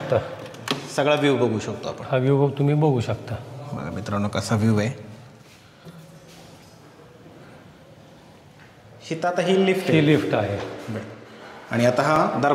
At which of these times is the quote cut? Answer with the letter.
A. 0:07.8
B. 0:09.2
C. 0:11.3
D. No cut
B